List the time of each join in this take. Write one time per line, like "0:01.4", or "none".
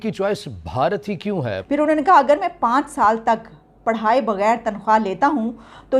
0:01.6